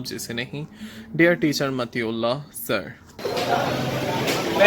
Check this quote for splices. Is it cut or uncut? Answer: cut